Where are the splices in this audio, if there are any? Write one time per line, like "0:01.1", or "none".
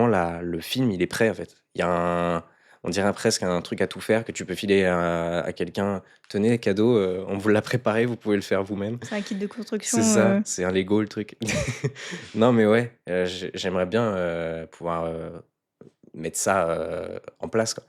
none